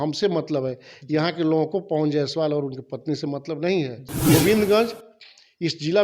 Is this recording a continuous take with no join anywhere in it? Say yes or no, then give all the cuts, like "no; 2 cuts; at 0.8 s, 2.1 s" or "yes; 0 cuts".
no; 1 cut; at 4.1 s